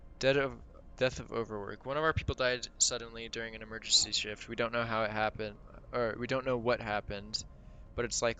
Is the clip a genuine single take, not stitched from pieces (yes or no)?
yes